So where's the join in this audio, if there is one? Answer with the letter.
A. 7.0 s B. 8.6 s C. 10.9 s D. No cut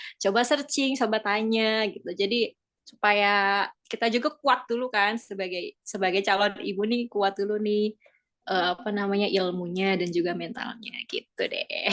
D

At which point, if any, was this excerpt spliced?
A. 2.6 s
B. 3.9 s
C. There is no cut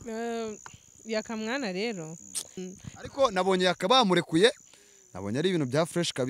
A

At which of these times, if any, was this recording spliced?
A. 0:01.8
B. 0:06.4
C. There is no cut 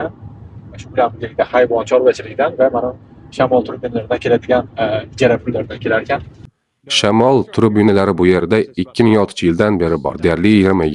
B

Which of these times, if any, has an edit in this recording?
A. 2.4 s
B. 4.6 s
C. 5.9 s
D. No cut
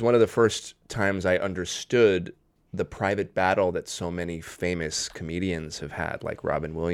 D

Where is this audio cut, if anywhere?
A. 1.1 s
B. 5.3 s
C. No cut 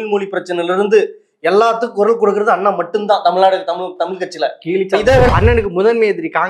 B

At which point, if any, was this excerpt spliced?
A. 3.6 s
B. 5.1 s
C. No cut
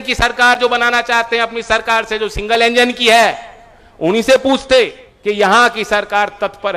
B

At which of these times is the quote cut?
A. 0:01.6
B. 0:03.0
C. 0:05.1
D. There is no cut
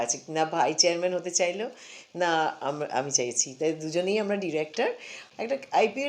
C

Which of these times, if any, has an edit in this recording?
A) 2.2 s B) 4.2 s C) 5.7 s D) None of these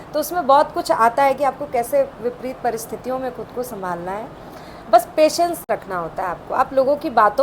D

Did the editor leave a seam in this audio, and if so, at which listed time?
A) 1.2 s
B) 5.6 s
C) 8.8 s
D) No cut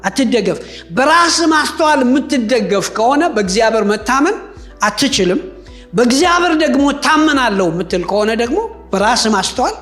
D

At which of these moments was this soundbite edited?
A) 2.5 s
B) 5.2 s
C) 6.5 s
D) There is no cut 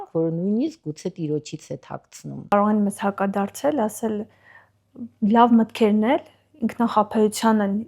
A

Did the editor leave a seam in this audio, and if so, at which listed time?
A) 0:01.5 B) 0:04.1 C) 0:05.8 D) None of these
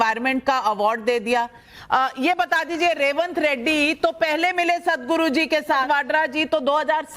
C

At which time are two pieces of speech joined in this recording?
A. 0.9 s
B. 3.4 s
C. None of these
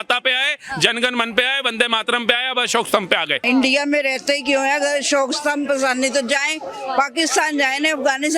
B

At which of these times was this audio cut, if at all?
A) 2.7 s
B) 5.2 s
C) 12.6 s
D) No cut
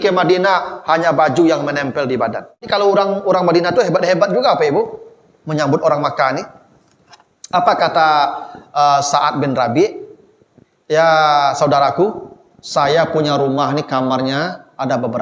A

